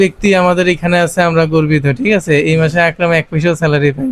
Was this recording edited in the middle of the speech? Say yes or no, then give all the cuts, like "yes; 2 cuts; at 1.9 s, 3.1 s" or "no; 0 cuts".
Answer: no; 0 cuts